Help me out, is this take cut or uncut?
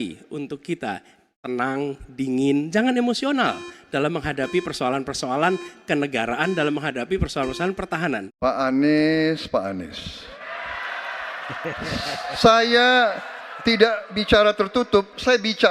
cut